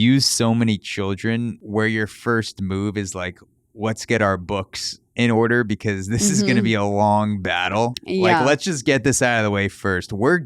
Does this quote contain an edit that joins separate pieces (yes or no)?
yes